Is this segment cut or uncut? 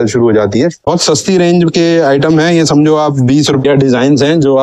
cut